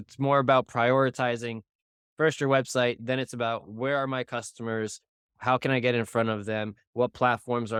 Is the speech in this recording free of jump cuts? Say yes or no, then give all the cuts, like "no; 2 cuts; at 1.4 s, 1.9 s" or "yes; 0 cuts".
yes; 0 cuts